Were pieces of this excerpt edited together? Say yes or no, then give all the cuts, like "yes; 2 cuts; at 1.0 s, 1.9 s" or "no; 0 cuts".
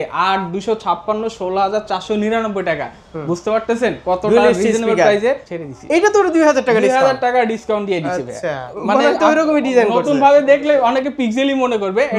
yes; 2 cuts; at 5.5 s, 8.8 s